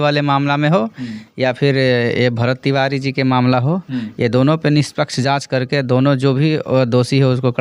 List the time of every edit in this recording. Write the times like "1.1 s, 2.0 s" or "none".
none